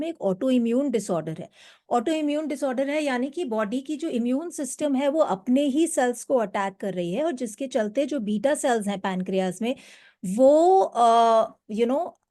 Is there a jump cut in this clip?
no; 0 cuts

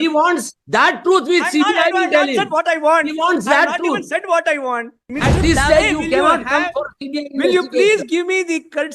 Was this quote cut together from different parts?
yes; 1 cut; at 5.0 s

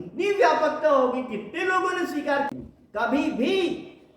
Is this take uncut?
no; 1 cut; at 2.5 s

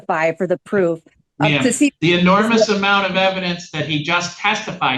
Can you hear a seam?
no; 0 cuts

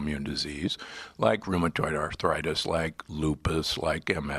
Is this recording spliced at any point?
yes; 1 cut; at 2.1 s

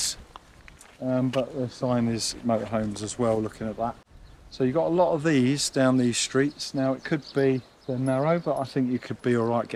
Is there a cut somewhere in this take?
no; 0 cuts

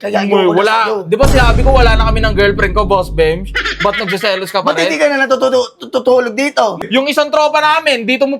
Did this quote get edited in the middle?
yes; 1 cut; at 6.8 s

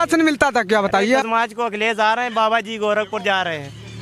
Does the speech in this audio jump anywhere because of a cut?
yes; 1 cut; at 1.2 s

